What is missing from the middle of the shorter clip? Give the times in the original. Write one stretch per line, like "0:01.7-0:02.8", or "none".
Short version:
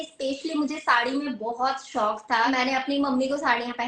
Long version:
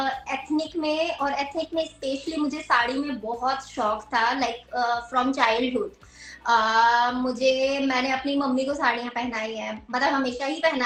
0:04.3-0:07.9